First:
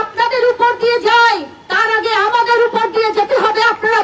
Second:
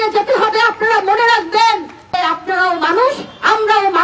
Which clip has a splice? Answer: second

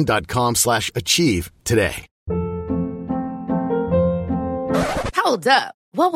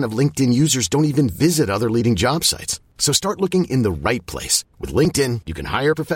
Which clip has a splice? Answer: first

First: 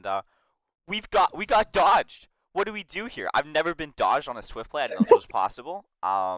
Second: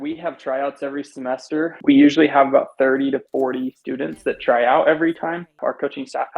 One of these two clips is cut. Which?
second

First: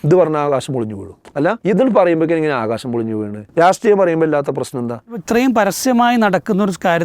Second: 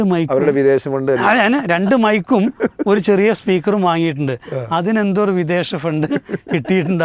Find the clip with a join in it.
first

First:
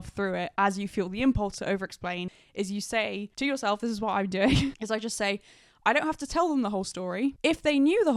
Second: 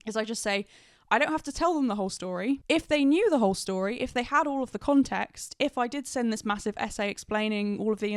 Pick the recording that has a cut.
first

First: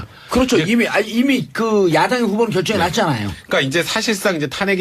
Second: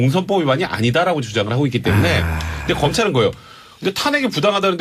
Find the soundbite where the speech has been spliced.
second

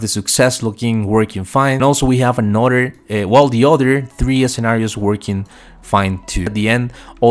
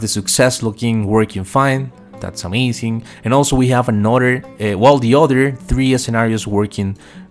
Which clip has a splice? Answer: first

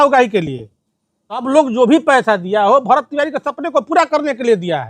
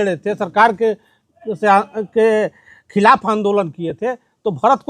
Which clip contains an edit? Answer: first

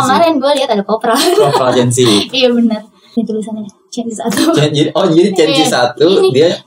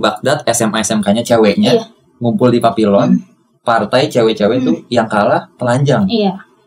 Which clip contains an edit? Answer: first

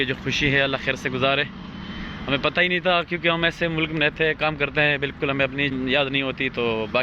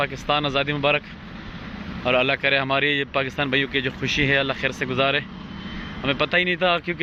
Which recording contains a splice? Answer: first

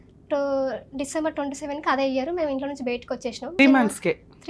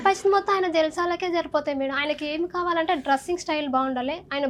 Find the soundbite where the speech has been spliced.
first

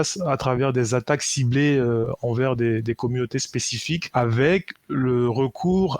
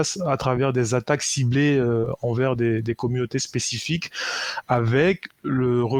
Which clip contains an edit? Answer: first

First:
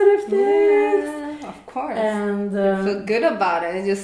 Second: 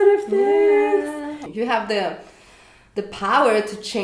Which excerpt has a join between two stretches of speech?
second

